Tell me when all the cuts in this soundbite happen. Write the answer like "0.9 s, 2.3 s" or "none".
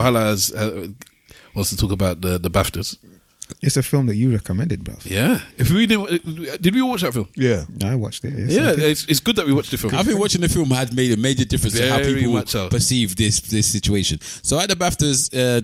none

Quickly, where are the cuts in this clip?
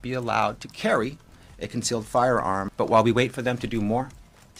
2.7 s

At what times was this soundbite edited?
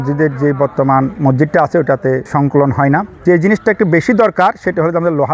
1.1 s, 2.2 s, 3.1 s

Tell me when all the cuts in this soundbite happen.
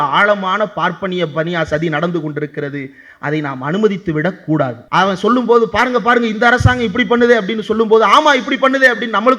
4.8 s

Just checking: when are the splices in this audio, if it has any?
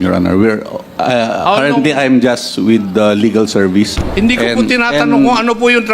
4.0 s

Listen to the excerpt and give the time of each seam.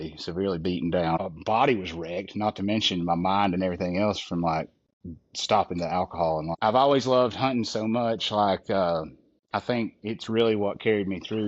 1.2 s, 6.5 s

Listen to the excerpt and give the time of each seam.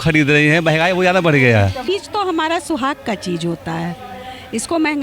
1.8 s

